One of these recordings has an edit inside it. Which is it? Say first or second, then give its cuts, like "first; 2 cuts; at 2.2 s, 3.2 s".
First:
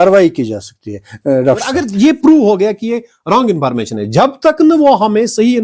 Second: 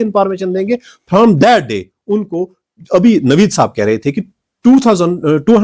first; 1 cut; at 1.8 s